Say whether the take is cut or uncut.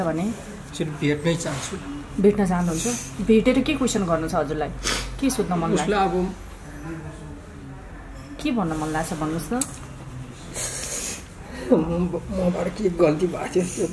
uncut